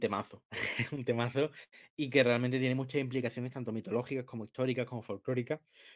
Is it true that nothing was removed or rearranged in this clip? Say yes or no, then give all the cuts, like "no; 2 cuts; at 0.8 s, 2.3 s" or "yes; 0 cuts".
yes; 0 cuts